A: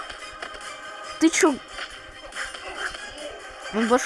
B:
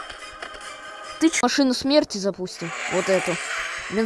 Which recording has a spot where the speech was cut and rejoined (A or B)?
B